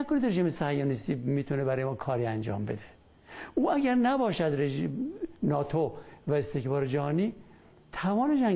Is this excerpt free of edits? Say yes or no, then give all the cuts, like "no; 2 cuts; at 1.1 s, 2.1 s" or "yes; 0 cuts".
yes; 0 cuts